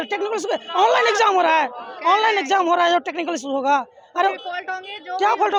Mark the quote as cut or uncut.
uncut